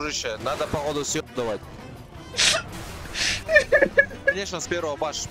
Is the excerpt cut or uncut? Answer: cut